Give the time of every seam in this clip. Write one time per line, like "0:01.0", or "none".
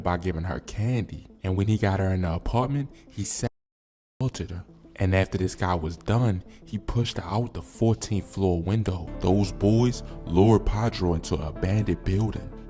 0:09.1